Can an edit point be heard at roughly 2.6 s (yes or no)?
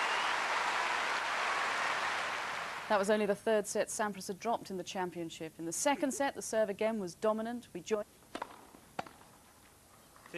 yes